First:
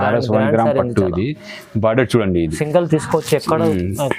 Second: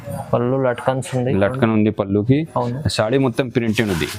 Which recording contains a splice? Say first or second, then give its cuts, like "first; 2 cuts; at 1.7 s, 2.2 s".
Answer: first; 1 cut; at 2.6 s